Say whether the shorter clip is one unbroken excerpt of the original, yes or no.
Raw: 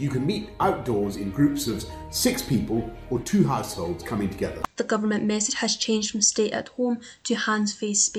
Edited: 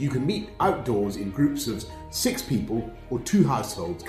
yes